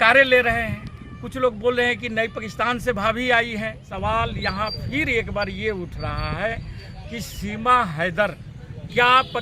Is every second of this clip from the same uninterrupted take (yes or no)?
no